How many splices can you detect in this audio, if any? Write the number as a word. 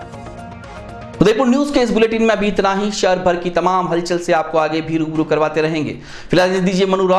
zero